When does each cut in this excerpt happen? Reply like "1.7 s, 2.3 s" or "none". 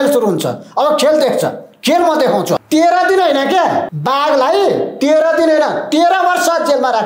2.6 s, 3.9 s